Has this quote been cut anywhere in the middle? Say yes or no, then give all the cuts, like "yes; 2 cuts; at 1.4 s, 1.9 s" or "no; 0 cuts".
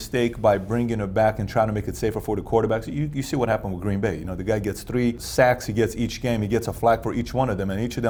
no; 0 cuts